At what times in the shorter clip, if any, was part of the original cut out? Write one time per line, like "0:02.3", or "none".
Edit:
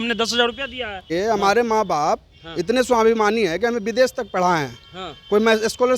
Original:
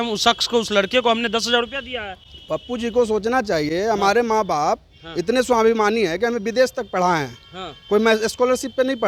0:01.1